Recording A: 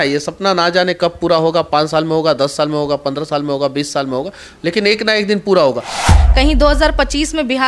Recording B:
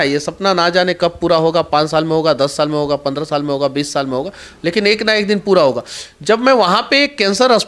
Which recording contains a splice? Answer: A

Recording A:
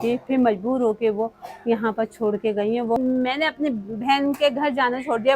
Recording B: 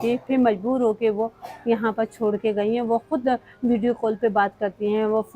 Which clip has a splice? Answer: A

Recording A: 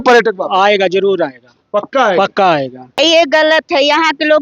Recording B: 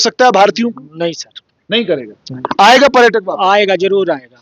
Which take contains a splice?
A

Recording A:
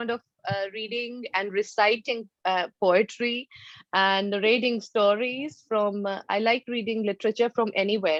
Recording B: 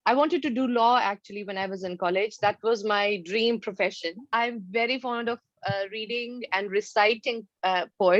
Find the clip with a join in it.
B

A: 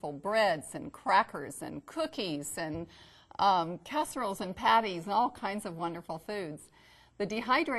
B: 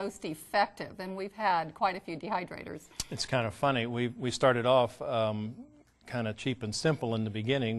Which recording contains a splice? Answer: B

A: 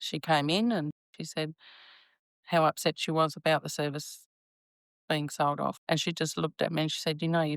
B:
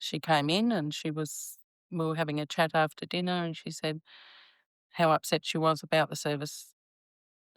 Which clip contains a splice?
A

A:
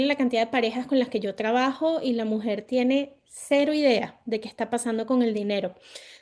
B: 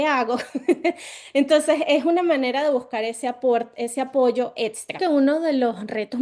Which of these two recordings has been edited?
B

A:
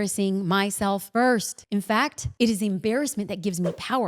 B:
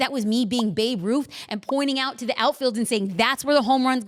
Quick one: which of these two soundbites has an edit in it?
A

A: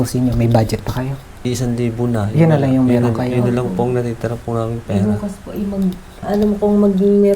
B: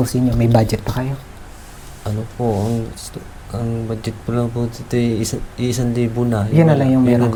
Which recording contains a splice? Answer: A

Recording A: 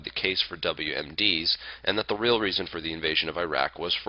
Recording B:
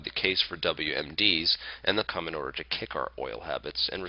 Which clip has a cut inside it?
A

